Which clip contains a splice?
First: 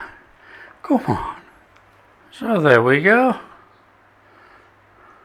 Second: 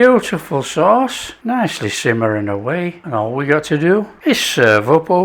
second; 3 cuts; at 1.3 s, 3.0 s, 4.1 s

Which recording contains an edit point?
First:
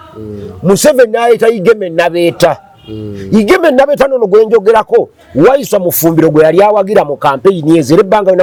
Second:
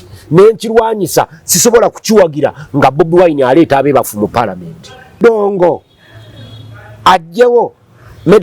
second; 1 cut; at 5.2 s

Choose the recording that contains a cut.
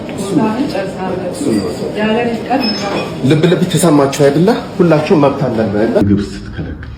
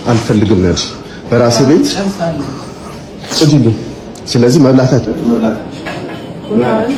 first; 1 cut; at 6.0 s

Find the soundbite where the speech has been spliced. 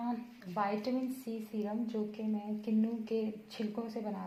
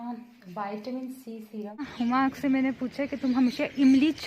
second; 1 cut; at 1.9 s

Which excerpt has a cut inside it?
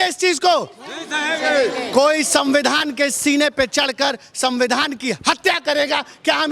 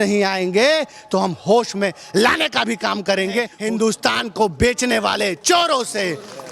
second; 1 cut; at 3.5 s

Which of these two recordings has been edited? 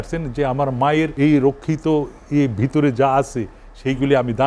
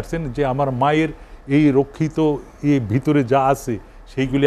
first; 1 cut; at 1.1 s

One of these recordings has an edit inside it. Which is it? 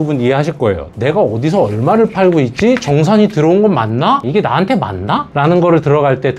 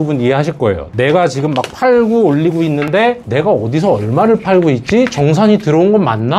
first; 2 cuts; at 0.9 s, 4.2 s

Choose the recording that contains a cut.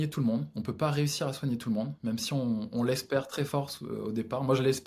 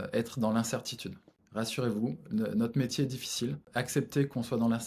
second; 2 cuts; at 1.4 s, 3.7 s

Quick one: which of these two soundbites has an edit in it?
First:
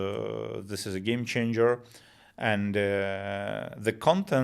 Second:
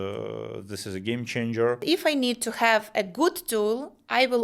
second; 1 cut; at 1.8 s

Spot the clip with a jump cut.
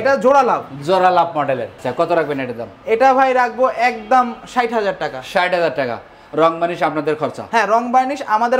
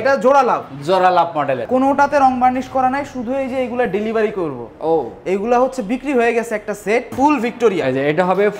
second; 2 cuts; at 1.6 s, 7.1 s

